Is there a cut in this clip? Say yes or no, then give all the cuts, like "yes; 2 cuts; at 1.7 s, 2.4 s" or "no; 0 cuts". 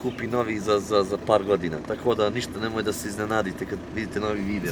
no; 0 cuts